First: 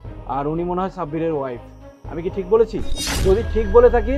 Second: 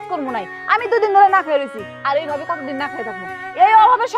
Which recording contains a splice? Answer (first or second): first